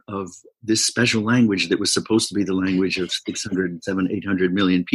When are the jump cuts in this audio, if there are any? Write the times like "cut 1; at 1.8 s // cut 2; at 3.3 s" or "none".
none